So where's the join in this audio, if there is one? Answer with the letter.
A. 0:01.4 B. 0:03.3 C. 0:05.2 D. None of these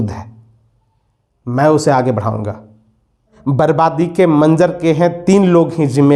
B